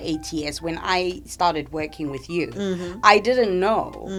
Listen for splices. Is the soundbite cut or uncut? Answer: uncut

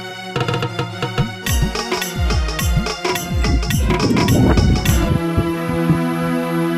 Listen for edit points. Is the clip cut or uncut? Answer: uncut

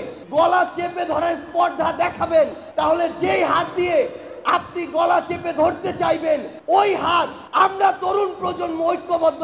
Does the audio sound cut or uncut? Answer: uncut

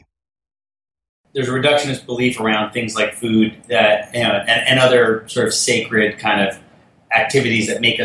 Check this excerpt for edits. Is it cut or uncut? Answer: cut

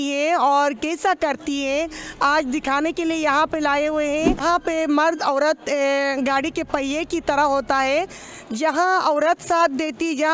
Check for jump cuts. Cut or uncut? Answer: cut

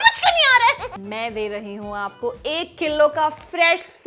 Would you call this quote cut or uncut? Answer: cut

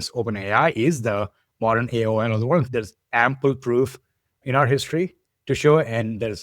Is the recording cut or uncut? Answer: cut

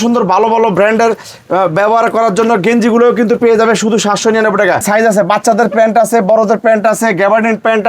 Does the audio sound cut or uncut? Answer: cut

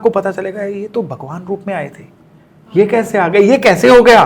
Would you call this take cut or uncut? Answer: uncut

